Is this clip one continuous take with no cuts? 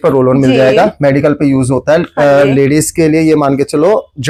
yes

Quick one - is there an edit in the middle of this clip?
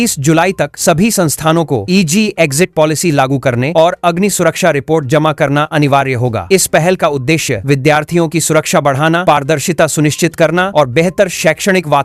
no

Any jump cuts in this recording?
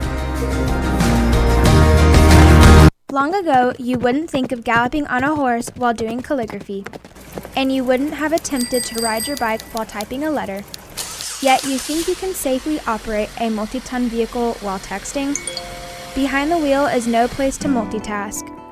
yes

